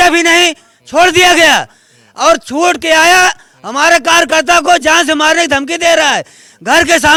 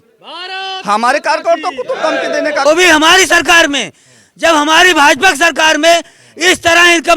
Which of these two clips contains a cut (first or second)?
second